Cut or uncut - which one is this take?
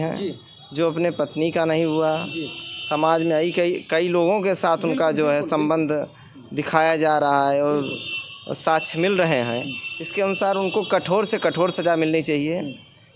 uncut